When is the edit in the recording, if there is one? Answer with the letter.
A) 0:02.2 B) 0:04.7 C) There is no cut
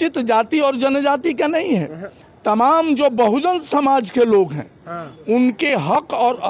C